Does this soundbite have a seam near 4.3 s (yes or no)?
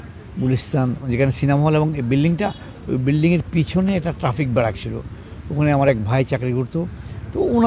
no